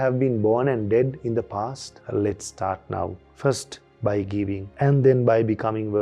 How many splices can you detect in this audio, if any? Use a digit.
1